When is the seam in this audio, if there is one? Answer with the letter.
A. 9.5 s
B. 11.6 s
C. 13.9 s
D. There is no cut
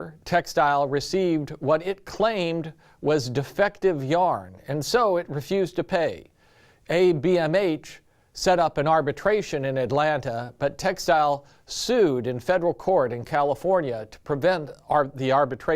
A